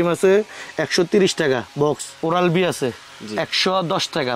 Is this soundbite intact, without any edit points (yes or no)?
no